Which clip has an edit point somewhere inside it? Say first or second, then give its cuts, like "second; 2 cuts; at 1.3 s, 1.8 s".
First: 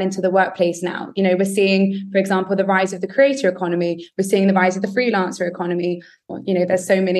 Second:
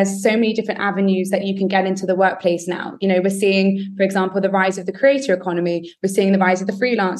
first; 1 cut; at 6.3 s